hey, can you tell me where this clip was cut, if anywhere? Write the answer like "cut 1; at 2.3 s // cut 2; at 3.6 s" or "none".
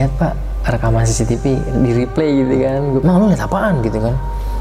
cut 1; at 3.0 s